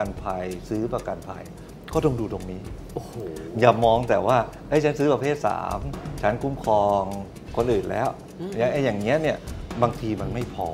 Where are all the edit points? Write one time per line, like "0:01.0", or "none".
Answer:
none